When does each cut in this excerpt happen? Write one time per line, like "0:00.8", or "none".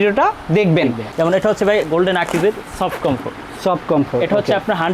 0:01.1